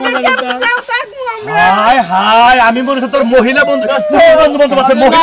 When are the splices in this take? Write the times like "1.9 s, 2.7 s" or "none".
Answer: none